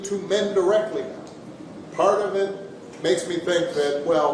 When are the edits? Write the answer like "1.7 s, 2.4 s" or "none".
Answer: none